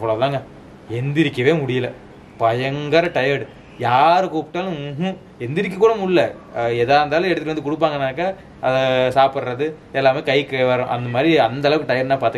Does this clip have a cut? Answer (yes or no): no